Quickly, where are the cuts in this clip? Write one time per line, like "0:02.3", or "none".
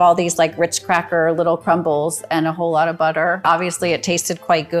0:03.4